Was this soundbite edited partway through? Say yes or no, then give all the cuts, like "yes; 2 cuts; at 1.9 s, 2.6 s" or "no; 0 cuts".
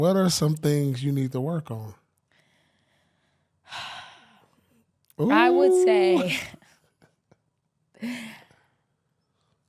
no; 0 cuts